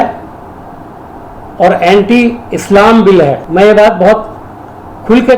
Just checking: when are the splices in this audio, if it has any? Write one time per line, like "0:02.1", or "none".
none